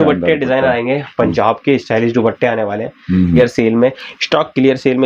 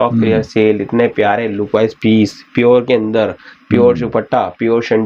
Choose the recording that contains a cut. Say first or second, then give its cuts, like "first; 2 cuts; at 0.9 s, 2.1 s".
first; 1 cut; at 3.4 s